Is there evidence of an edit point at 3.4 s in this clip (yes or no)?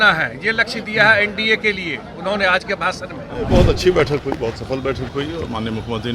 yes